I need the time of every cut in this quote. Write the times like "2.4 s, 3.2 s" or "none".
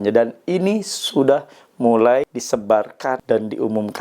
2.8 s